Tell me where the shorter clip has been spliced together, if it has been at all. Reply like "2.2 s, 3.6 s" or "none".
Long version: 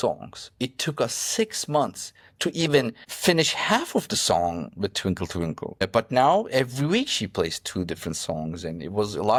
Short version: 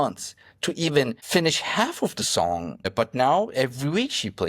1.2 s, 2.8 s